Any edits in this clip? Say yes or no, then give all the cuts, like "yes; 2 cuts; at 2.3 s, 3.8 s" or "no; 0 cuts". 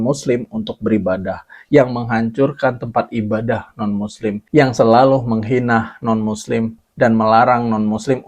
no; 0 cuts